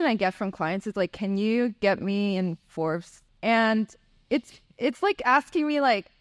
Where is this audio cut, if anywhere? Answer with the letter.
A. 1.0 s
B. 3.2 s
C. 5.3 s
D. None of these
B